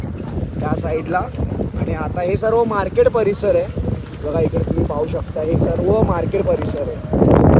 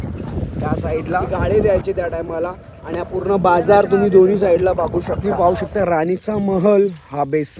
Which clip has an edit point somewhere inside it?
second; 2 cuts; at 1.3 s, 5.3 s

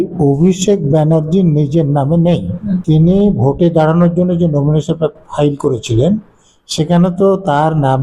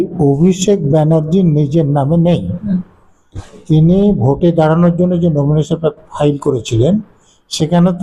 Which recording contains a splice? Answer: first; 1 cut; at 2.8 s

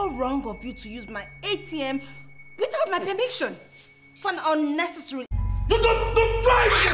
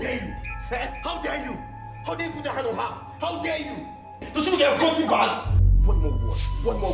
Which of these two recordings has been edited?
first; 1 cut; at 5.3 s

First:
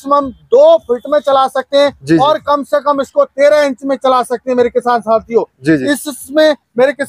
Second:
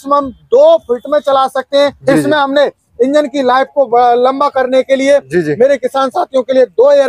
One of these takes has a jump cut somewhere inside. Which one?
second; 1 cut; at 2.0 s

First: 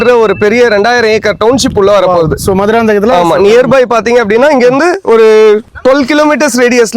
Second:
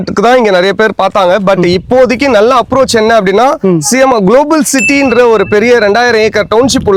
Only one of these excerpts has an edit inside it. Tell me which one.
first; 1 cut; at 5.7 s

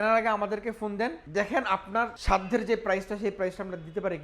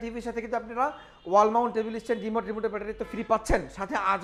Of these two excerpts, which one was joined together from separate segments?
first; 2 cuts; at 1.2 s, 2.2 s

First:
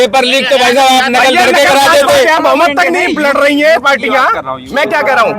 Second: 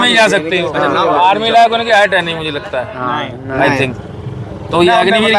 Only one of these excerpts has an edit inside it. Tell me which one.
first; 1 cut; at 2.4 s

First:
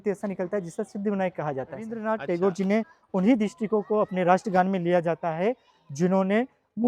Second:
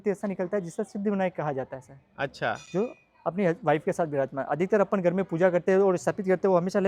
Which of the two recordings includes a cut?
first; 1 cut; at 2.0 s

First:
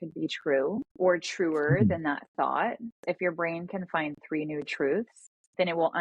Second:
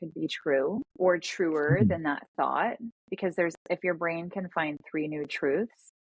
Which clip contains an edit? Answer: first; 1 cut; at 3.0 s

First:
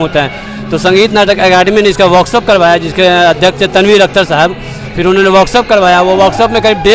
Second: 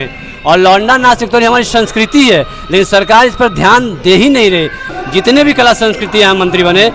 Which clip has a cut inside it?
second; 1 cut; at 4.8 s

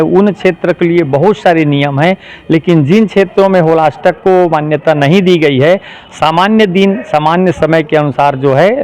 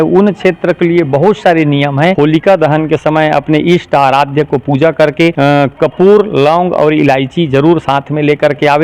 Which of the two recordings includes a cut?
second; 2 cuts; at 2.1 s, 5.3 s

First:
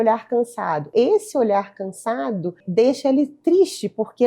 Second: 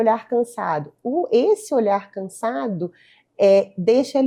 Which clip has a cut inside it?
first; 2 cuts; at 0.9 s, 2.6 s

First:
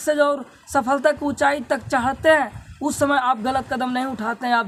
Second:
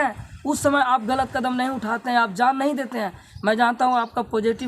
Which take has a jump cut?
second; 1 cut; at 3.2 s

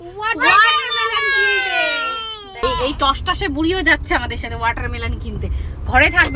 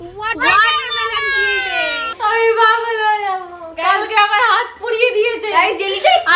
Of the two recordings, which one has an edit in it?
second; 1 cut; at 2.1 s

